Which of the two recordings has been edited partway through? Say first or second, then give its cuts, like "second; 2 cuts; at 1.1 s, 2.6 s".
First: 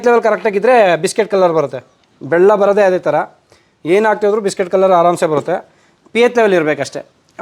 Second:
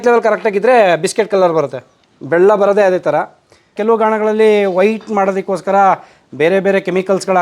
second; 1 cut; at 3.8 s